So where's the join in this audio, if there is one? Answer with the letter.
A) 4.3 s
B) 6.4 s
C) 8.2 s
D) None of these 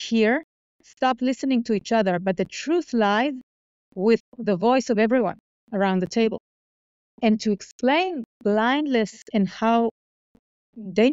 A